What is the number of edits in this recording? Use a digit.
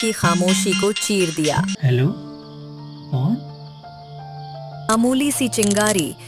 2